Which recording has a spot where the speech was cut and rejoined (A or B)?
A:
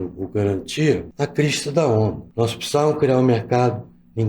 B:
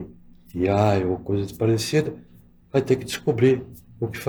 A